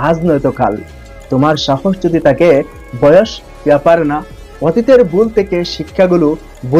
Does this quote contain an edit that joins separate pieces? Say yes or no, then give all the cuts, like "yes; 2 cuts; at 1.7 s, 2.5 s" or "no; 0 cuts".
no; 0 cuts